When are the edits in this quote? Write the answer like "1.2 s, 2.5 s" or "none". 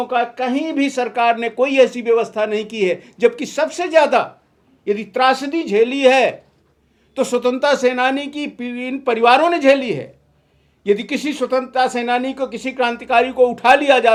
none

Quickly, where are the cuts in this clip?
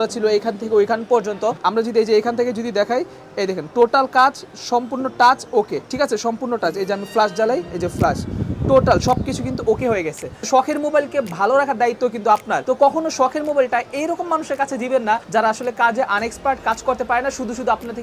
1.6 s, 10.4 s

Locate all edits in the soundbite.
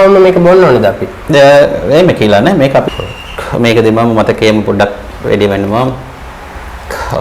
2.9 s

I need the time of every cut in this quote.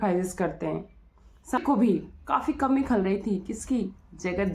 1.6 s

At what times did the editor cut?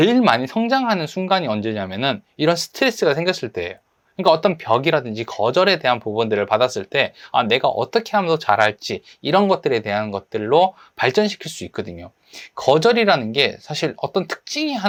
none

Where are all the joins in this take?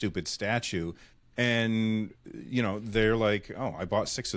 none

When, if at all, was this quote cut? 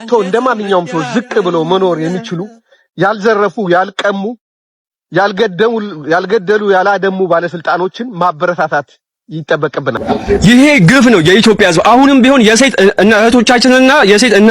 10.0 s

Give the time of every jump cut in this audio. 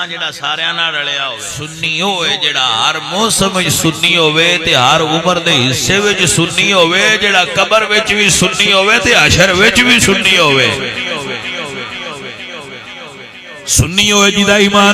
1.7 s

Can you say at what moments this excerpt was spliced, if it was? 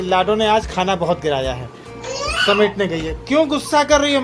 2.0 s

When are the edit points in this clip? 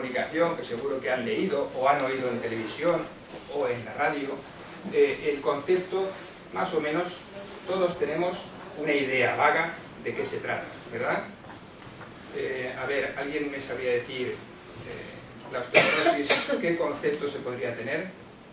11.0 s

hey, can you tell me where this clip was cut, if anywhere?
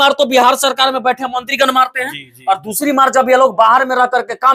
none

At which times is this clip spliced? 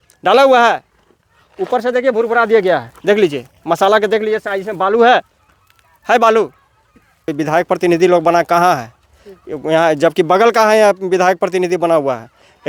7.3 s

